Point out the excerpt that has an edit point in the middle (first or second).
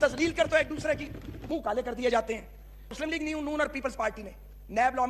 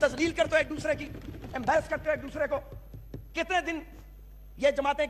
first